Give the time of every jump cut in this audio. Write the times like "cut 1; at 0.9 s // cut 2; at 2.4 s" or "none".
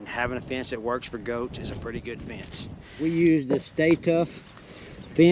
cut 1; at 2.9 s